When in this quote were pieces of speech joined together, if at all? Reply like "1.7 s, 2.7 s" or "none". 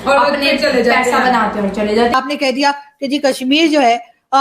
2.1 s